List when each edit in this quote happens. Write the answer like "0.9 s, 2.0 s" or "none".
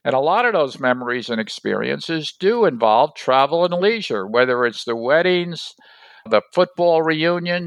6.3 s